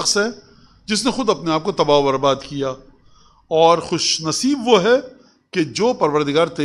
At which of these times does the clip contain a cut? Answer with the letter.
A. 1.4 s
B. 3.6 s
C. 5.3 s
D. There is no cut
D